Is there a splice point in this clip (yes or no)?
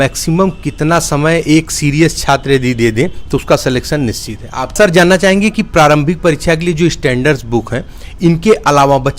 yes